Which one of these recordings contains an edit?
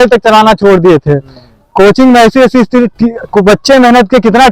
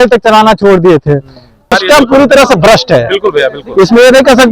second; 1 cut; at 1.7 s

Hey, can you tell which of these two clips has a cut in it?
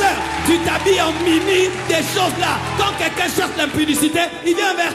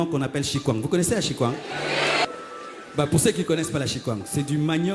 second; 1 cut; at 2.2 s

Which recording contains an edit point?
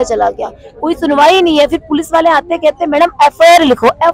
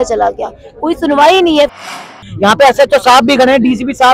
second; 1 cut; at 2.1 s

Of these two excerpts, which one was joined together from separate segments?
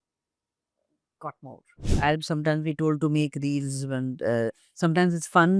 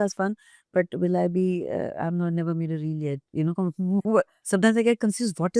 first; 1 cut; at 1.8 s

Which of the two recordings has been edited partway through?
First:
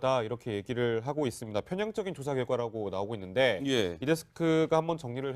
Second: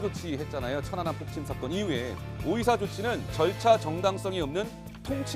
first; 1 cut; at 3.1 s

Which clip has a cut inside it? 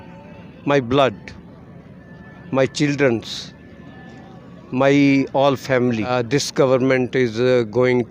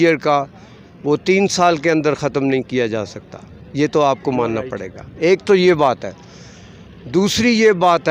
first; 1 cut; at 6.1 s

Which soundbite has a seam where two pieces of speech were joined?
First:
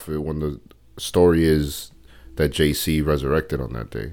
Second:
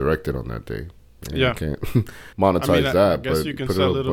second; 1 cut; at 2.2 s

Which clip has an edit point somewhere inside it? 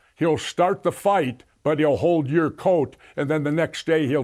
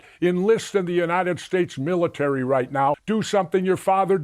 second; 1 cut; at 3.0 s

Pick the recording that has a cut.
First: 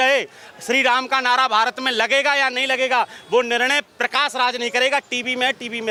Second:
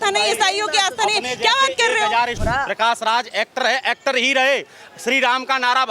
second; 1 cut; at 2.4 s

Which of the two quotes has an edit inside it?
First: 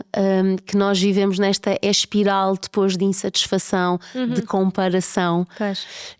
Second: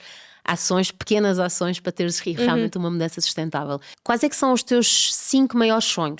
second; 1 cut; at 3.9 s

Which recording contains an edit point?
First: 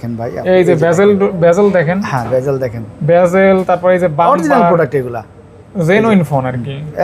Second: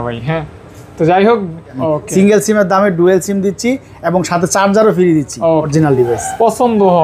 second; 2 cuts; at 1.7 s, 5.7 s

